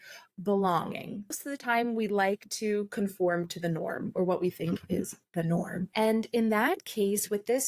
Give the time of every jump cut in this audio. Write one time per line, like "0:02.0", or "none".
0:01.4
0:05.9